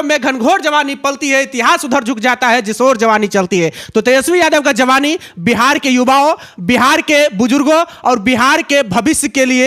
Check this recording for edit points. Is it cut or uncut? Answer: uncut